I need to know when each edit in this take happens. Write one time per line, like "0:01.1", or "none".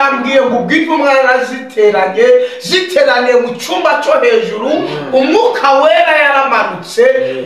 none